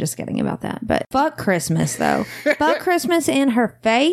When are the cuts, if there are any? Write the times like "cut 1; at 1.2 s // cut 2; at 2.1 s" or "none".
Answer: cut 1; at 1.1 s